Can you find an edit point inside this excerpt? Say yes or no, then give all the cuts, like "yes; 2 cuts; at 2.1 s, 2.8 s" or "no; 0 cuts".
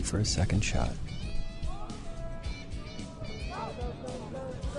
yes; 1 cut; at 1.3 s